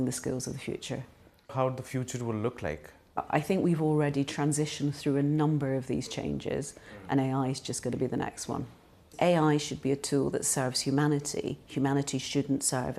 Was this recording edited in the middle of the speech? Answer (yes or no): yes